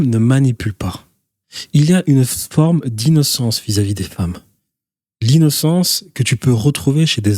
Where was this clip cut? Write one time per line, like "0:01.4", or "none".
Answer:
none